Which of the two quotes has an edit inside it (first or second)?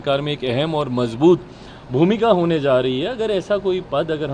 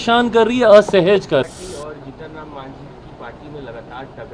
second